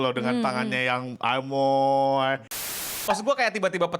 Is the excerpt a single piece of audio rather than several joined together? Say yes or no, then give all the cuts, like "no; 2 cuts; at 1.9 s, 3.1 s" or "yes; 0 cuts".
no; 1 cut; at 2.9 s